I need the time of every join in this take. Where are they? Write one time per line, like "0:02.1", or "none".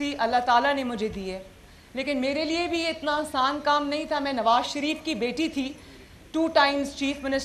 none